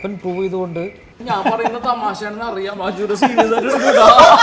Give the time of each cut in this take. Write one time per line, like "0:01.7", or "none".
0:01.2